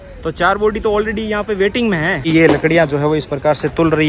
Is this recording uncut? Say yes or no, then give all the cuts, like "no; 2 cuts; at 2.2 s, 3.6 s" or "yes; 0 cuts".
no; 1 cut; at 2.2 s